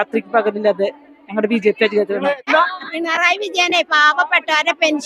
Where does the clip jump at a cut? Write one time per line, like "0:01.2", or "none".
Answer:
0:02.5